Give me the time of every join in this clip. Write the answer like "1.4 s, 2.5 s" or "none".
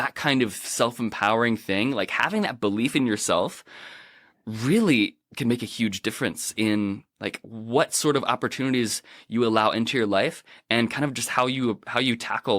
5.2 s